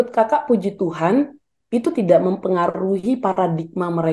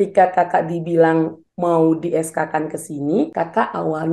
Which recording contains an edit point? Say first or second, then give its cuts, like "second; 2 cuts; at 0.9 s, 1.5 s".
second; 2 cuts; at 1.4 s, 3.3 s